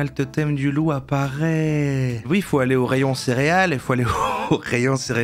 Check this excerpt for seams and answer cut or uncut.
cut